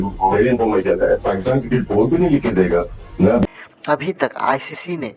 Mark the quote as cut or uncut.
cut